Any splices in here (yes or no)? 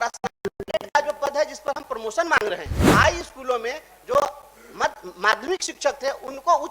yes